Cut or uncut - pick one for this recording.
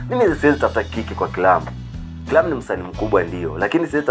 uncut